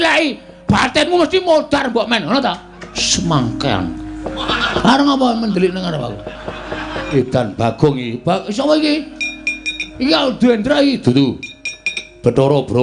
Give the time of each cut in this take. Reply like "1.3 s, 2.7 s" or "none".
3.0 s, 4.7 s, 7.1 s